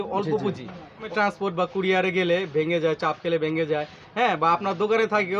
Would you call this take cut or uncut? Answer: cut